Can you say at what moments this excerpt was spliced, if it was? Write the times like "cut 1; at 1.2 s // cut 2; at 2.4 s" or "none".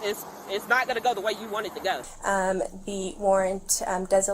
cut 1; at 2.1 s